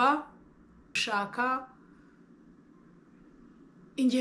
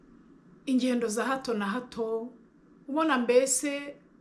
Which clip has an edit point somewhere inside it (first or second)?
first